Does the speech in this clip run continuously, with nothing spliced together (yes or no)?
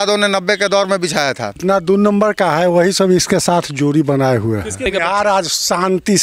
no